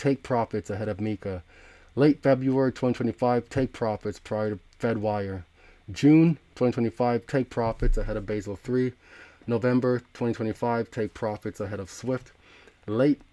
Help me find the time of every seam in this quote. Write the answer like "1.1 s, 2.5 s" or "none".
none